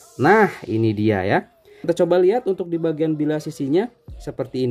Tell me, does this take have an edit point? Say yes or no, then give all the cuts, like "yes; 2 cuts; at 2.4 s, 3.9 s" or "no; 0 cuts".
yes; 1 cut; at 1.9 s